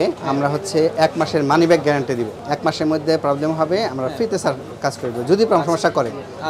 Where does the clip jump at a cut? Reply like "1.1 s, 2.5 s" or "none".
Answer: 2.4 s